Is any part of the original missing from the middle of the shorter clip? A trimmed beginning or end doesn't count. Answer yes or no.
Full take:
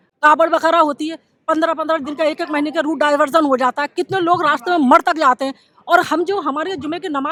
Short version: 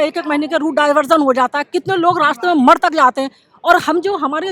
no